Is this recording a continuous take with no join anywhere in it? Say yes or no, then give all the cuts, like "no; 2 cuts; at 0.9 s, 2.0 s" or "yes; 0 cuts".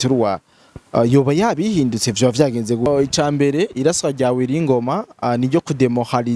no; 1 cut; at 2.9 s